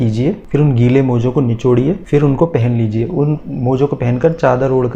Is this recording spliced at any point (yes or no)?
no